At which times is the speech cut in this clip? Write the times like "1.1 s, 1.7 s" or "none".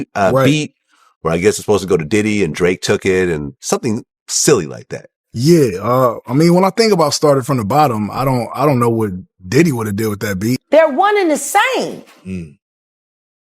10.1 s